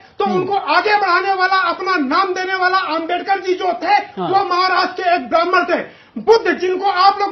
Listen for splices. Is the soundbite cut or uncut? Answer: uncut